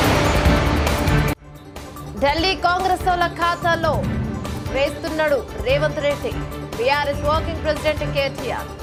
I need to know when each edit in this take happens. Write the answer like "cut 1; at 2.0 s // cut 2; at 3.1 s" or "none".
none